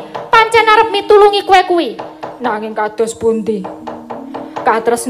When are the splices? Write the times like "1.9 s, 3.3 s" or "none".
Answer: 1.4 s